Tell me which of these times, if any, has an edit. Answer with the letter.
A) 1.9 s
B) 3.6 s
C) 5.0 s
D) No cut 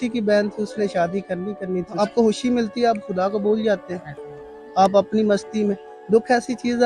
A